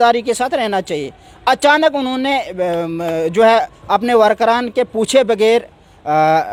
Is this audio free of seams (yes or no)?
yes